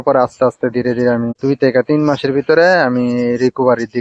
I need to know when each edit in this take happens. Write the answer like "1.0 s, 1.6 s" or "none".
1.3 s